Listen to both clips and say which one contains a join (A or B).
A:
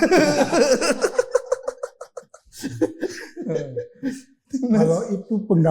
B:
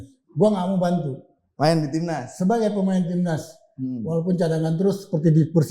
A